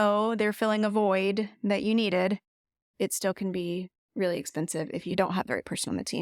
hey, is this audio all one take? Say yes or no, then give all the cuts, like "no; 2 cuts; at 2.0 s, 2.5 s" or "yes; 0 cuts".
no; 1 cut; at 5.1 s